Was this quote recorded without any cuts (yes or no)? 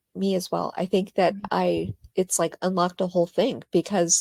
yes